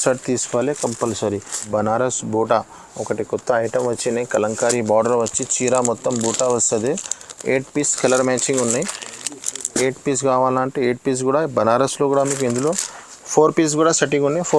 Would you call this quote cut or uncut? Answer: cut